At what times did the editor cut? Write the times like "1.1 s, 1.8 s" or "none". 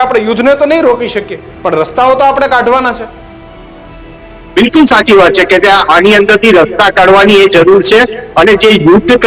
none